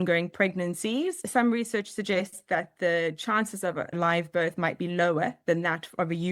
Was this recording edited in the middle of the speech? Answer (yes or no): yes